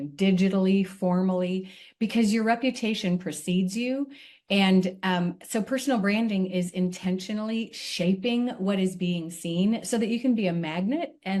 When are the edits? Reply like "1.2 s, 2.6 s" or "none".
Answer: none